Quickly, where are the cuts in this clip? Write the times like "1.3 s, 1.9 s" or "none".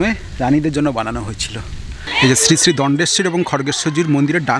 2.0 s